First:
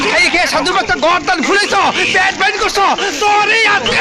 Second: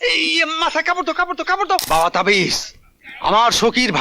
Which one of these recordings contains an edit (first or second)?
second